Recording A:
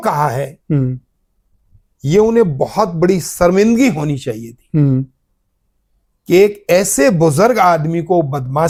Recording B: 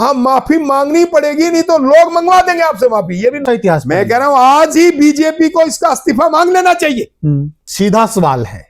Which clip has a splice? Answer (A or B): B